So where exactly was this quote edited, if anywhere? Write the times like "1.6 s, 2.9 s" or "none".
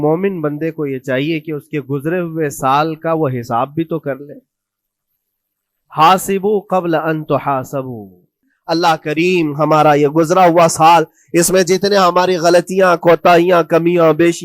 8.5 s